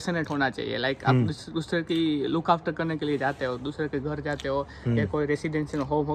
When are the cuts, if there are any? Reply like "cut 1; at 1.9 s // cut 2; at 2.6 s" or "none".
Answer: none